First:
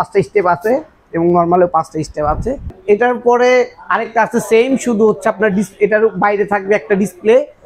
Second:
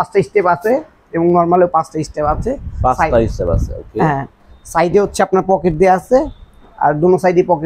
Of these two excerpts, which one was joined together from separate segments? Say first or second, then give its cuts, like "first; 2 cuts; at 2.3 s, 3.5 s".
first; 1 cut; at 2.7 s